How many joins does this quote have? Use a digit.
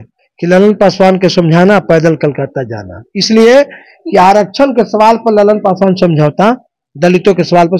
0